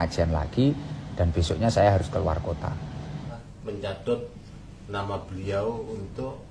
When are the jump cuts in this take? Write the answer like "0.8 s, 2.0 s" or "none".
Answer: 3.3 s